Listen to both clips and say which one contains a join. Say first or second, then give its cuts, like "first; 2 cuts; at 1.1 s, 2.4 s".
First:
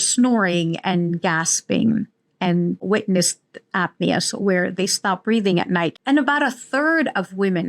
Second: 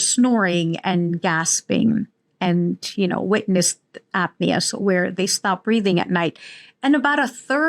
first; 2 cuts; at 2.8 s, 6.0 s